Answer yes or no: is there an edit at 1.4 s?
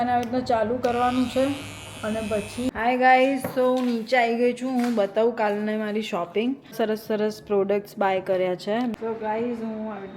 no